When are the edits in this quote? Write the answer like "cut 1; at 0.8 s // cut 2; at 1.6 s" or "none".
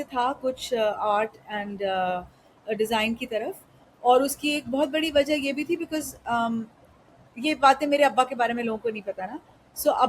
none